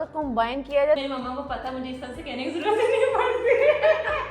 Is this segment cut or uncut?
cut